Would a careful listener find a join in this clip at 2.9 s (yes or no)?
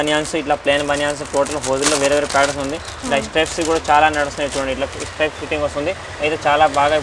no